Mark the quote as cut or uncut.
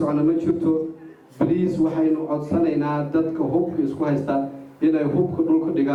uncut